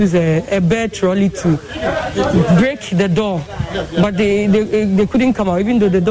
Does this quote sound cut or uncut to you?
uncut